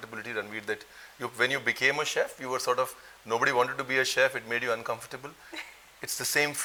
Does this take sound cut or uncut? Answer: uncut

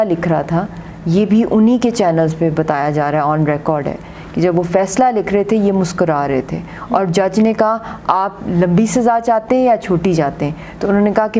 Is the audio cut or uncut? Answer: uncut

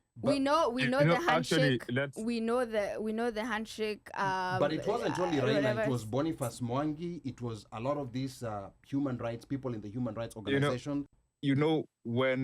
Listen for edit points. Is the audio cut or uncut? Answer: cut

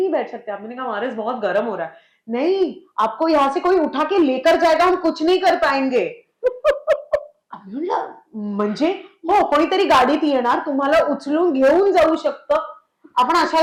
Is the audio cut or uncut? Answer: uncut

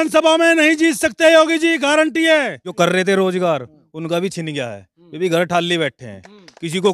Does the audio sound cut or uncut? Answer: cut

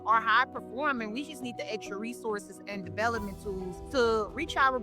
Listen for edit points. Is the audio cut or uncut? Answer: cut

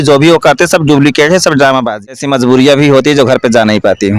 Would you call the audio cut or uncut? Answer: cut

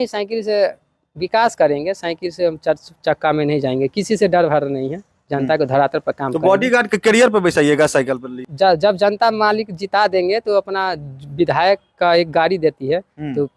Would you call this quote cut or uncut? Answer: cut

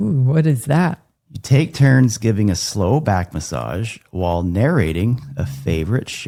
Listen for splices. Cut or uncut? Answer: uncut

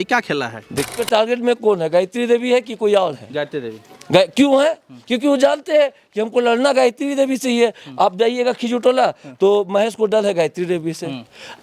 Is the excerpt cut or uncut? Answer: cut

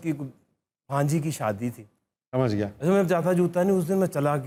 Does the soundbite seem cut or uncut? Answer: uncut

